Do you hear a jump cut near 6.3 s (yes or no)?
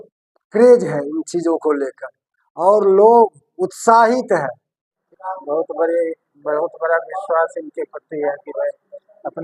no